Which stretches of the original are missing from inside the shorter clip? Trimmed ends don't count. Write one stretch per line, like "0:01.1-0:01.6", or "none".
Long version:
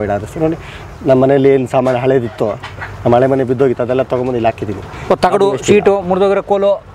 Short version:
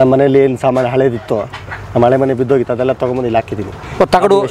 none